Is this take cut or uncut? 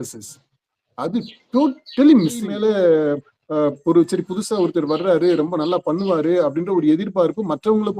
cut